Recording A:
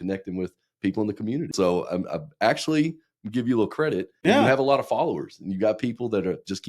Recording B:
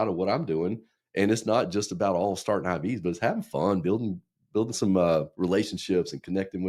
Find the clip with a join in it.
A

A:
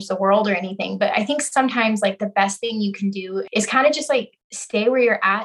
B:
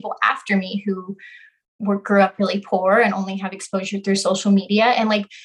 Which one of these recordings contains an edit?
A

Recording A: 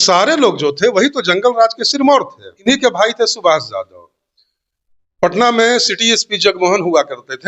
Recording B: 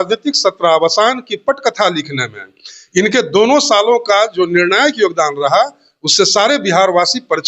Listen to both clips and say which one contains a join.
A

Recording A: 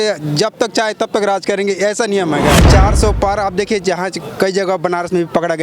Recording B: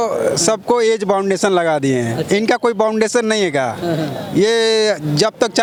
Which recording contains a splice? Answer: A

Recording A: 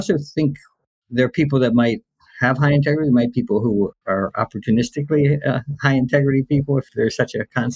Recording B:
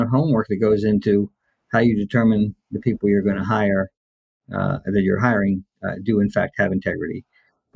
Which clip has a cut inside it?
A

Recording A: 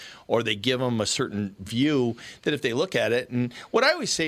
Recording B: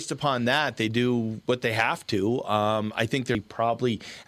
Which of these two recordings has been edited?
B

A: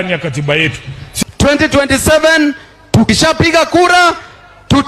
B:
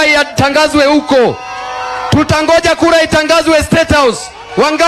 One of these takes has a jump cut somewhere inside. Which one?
A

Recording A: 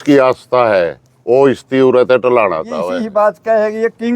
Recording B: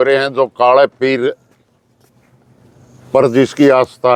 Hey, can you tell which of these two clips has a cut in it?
A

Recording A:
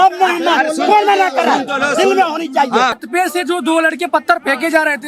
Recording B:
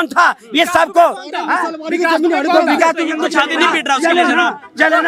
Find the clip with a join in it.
A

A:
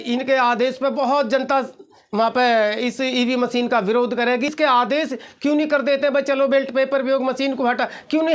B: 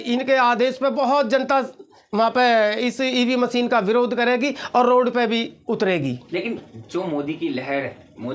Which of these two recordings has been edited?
A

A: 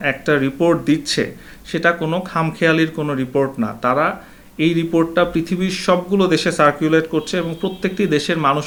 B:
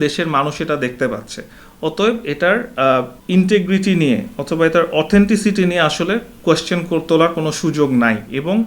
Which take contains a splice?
B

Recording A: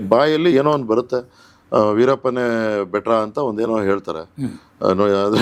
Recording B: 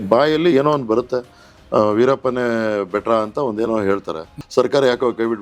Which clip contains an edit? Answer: B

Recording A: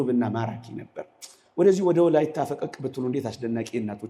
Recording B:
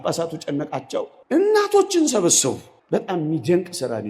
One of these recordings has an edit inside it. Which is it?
B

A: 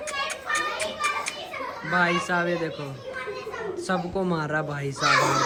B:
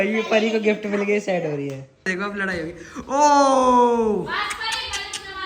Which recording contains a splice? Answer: B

